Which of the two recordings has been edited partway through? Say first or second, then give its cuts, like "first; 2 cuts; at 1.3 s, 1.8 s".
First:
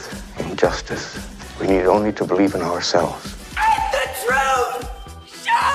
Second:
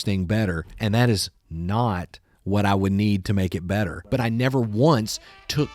second; 1 cut; at 4.1 s